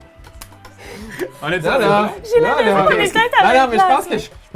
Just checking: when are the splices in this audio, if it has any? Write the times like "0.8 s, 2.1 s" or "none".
none